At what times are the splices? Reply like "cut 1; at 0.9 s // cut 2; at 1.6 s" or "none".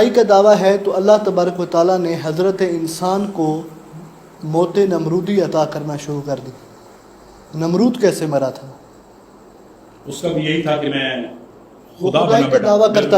none